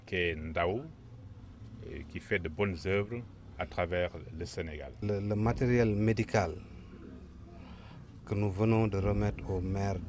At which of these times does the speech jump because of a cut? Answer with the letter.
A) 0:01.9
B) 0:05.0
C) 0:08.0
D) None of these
B